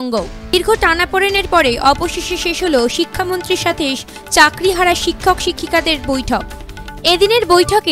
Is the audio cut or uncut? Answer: uncut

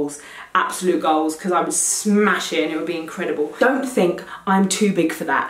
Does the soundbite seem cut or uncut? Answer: cut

